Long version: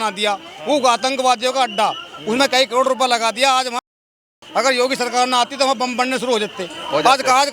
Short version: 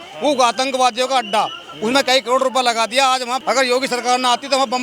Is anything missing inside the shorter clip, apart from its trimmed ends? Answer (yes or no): yes